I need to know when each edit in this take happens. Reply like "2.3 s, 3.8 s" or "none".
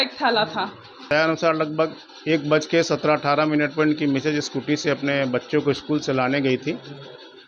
1.1 s